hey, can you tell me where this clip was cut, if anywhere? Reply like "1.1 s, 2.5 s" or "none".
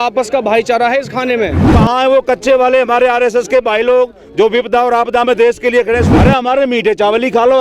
1.6 s, 6.1 s